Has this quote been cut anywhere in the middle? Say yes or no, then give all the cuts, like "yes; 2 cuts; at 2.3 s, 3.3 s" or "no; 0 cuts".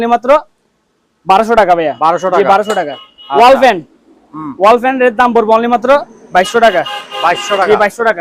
no; 0 cuts